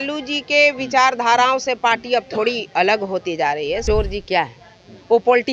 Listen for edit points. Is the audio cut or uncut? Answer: cut